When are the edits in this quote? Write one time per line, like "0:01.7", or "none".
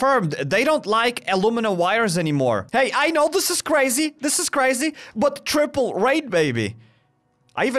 0:02.6